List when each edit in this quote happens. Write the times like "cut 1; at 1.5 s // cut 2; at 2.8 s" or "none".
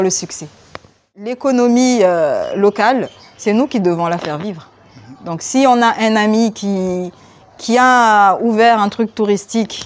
cut 1; at 1.4 s

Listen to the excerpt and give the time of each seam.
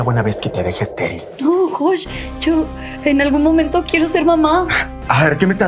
cut 1; at 1.3 s

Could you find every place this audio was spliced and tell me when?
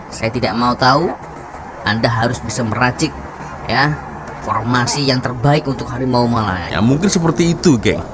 none

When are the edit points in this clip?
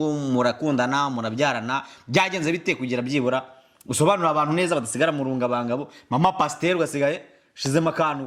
none

